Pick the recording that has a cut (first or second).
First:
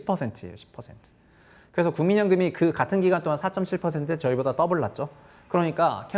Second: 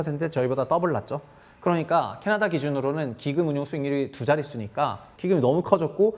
second